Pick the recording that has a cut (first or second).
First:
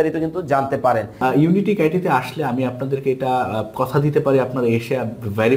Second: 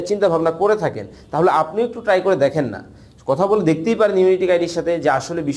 first